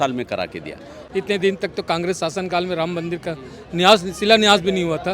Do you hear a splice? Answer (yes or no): yes